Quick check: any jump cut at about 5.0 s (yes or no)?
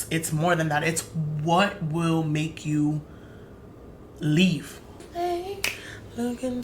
yes